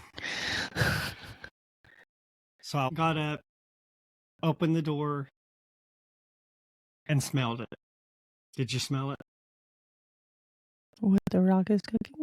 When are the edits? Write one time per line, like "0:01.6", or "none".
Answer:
0:02.9